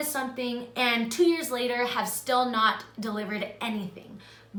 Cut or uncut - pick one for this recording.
uncut